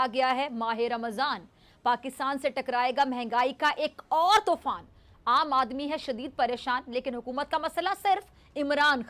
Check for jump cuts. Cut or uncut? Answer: uncut